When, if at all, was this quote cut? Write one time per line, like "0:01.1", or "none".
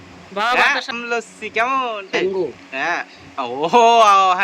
0:01.0
0:02.2